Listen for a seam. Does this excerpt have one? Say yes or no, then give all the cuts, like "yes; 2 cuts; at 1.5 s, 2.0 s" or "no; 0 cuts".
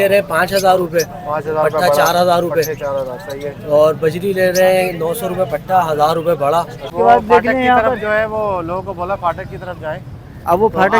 yes; 1 cut; at 6.9 s